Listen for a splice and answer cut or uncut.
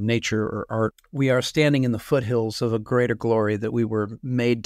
cut